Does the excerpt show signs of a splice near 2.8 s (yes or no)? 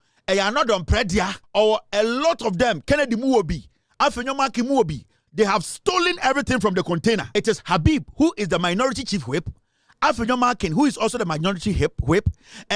no